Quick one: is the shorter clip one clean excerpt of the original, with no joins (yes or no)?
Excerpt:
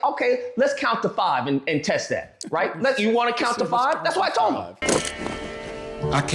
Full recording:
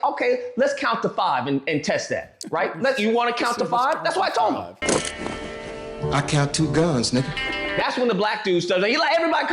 yes